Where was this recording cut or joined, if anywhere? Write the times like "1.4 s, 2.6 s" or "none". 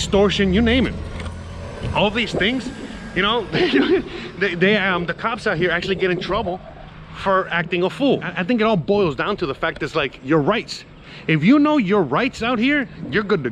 8.3 s